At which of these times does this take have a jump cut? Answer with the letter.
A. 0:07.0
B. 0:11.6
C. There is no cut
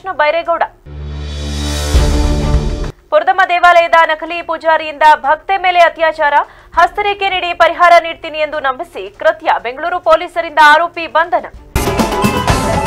B